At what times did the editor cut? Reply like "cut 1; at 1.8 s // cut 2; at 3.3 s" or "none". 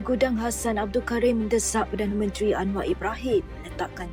none